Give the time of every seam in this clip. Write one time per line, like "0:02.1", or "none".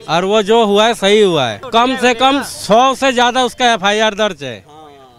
0:01.6